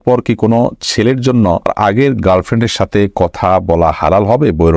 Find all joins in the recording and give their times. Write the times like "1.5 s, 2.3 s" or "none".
1.7 s